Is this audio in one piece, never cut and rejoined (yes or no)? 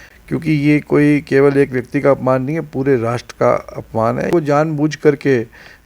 no